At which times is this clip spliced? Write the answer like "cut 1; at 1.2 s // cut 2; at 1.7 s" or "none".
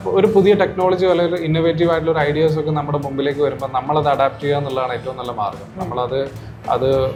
none